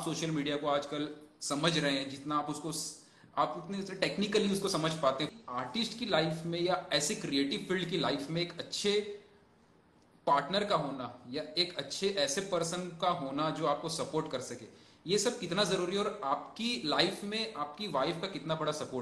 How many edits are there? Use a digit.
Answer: 1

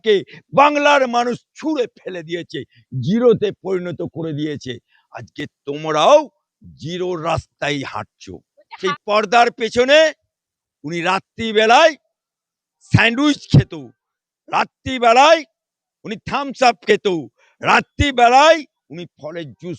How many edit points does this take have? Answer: 1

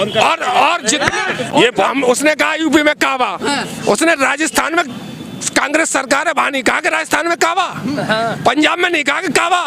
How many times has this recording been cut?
1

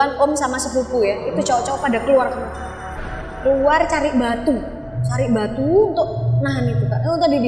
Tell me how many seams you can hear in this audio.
0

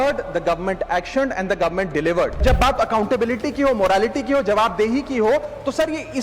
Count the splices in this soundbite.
1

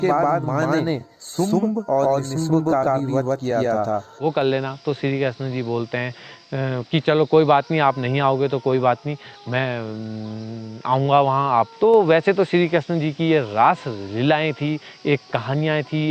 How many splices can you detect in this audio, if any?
2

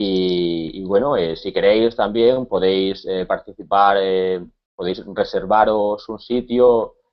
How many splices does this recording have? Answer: 0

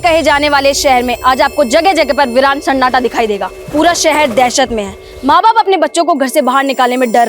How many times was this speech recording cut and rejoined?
1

